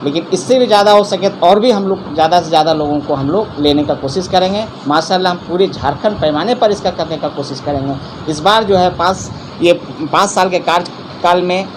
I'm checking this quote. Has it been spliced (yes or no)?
no